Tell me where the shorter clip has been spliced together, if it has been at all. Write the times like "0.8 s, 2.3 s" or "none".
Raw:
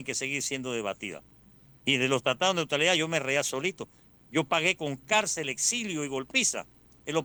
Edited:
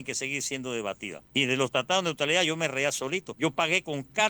1.1 s, 3.3 s